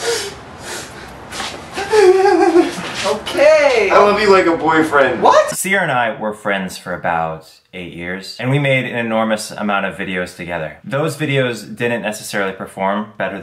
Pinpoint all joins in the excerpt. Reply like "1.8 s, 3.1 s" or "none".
5.6 s